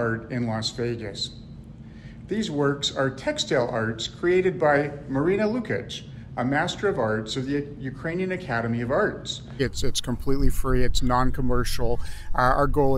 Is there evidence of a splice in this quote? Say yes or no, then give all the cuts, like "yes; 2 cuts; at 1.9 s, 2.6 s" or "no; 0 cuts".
yes; 1 cut; at 9.6 s